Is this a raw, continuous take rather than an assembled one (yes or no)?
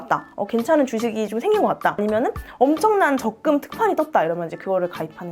yes